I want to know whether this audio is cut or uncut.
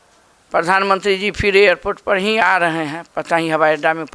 uncut